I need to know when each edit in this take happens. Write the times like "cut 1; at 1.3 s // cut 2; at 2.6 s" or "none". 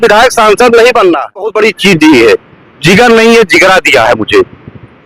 cut 1; at 1.5 s